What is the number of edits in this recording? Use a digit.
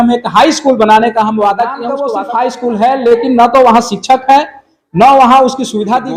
1